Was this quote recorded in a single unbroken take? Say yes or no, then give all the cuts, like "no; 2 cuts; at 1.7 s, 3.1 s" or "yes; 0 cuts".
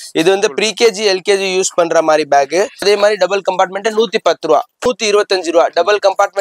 no; 2 cuts; at 2.8 s, 4.9 s